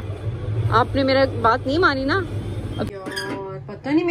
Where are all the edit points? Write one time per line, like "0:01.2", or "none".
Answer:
0:02.9